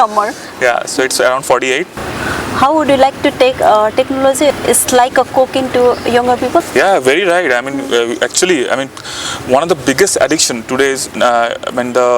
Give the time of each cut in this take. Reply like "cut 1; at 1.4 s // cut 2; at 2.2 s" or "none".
cut 1; at 2.1 s // cut 2; at 4.5 s // cut 3; at 6.6 s